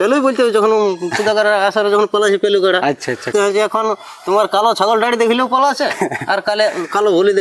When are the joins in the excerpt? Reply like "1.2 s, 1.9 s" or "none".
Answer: 3.3 s